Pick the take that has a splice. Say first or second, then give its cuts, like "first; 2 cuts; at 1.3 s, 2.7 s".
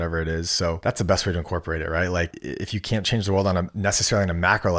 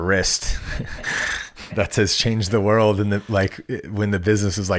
first; 3 cuts; at 0.8 s, 2.4 s, 3.7 s